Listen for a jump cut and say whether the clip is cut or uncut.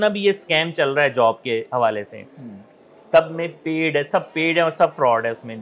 uncut